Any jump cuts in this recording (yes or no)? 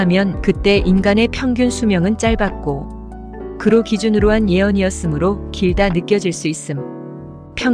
no